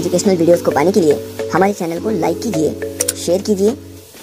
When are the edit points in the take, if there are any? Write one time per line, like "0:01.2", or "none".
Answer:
none